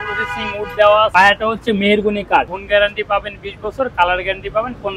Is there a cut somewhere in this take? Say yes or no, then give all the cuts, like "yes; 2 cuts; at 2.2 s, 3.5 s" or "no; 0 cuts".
yes; 2 cuts; at 1.1 s, 2.6 s